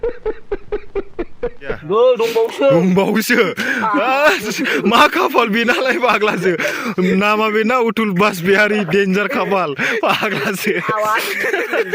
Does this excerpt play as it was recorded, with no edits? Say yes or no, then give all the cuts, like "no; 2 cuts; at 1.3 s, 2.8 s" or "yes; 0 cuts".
no; 1 cut; at 1.8 s